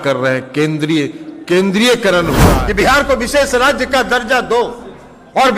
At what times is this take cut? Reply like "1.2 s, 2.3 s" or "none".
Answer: 2.5 s

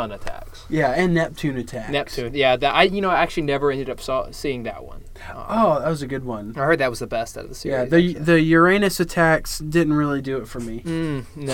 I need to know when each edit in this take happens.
none

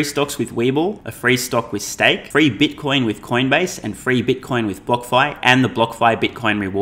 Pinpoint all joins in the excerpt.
1.1 s, 2.2 s

